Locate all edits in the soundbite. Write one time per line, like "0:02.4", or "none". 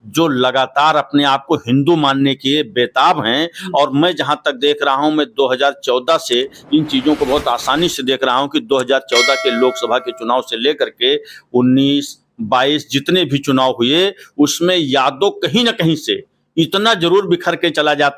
none